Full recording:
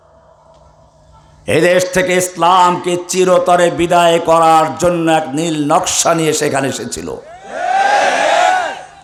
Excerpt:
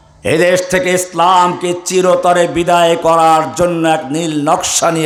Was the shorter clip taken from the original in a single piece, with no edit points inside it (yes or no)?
yes